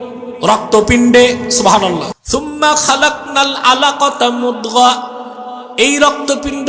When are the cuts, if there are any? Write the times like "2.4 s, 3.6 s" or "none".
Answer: 2.2 s